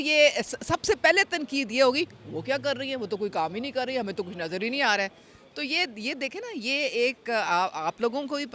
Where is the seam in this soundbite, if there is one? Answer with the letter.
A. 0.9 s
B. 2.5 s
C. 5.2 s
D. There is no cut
D